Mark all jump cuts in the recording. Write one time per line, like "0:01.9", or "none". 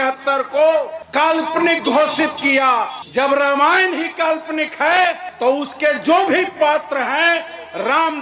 none